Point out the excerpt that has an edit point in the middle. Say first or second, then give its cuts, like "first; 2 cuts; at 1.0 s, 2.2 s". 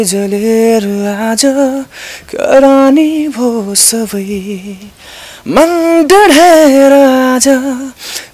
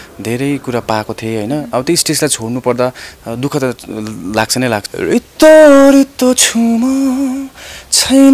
second; 1 cut; at 4.8 s